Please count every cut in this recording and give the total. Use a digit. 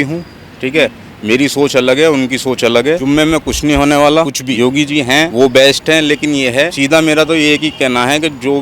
3